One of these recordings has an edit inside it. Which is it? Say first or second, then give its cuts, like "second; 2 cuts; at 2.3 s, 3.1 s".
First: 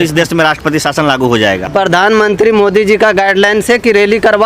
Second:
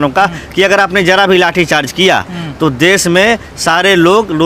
first; 1 cut; at 1.6 s